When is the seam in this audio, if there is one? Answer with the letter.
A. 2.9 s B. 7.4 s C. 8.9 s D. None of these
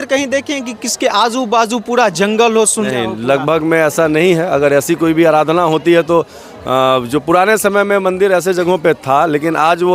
A